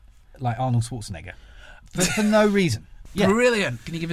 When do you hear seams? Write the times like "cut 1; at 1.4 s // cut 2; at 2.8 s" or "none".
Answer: cut 1; at 1.8 s // cut 2; at 3.0 s